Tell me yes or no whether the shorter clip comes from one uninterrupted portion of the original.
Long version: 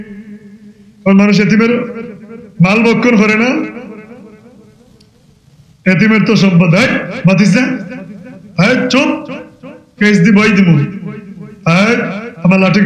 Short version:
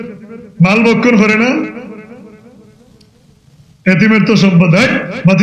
yes